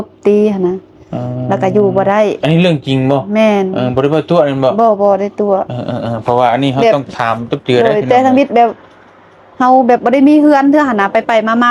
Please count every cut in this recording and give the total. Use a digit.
0